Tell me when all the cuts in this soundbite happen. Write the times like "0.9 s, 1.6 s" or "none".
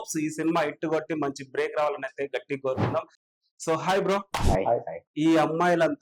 3.3 s, 5.0 s